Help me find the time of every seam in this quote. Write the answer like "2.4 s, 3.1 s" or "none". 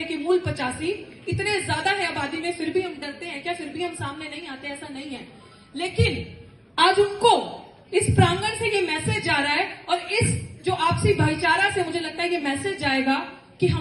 none